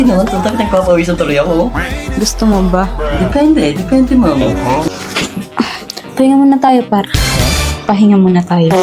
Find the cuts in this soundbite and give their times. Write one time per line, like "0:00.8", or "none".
0:04.9